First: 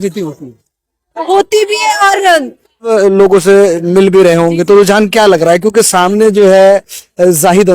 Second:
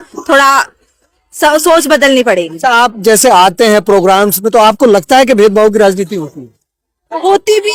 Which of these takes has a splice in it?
first; 1 cut; at 2.9 s

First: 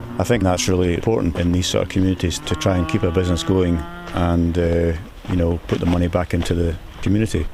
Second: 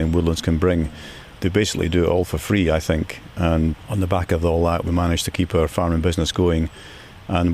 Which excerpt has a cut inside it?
second; 2 cuts; at 1.4 s, 3.7 s

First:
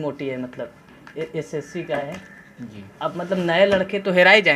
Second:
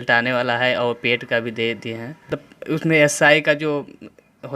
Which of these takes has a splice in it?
second; 1 cut; at 2.3 s

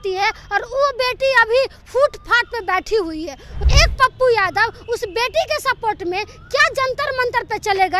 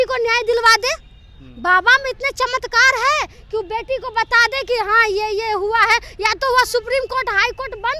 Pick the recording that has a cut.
first; 1 cut; at 3.5 s

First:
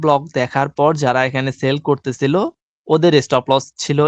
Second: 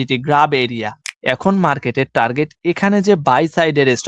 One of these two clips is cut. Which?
second; 1 cut; at 1.1 s

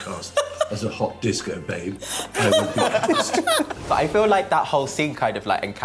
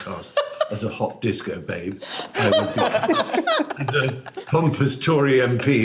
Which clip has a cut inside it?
first; 1 cut; at 3.8 s

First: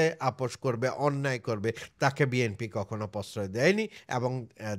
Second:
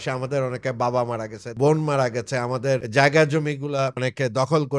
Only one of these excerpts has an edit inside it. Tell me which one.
second; 3 cuts; at 1.4 s, 2.9 s, 4.0 s

